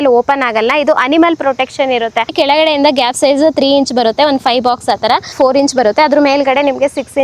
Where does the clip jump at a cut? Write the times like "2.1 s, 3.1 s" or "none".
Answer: 2.3 s, 5.3 s